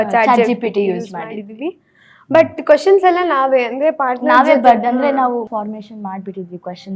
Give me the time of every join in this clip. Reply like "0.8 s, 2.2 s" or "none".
5.5 s

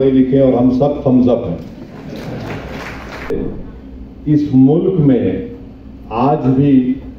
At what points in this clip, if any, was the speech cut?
3.3 s

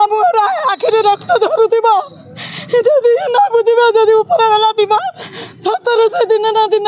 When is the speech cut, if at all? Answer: none

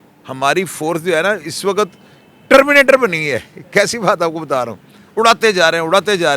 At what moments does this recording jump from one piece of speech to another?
none

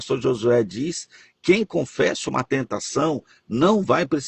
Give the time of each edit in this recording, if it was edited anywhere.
none

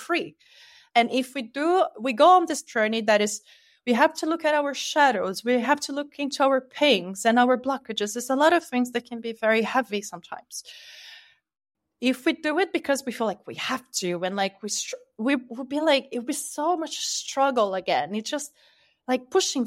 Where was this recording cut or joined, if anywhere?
none

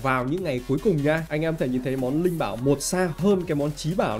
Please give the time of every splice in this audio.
1.3 s, 3.2 s

